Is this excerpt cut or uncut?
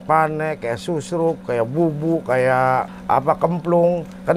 cut